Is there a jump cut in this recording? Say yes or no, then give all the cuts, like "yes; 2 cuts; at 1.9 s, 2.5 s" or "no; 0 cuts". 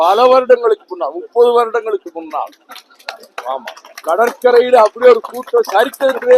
no; 0 cuts